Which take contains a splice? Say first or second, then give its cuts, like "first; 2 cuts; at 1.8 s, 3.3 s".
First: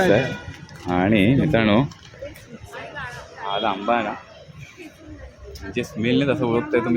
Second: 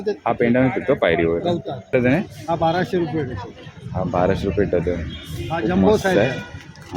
second; 1 cut; at 1.9 s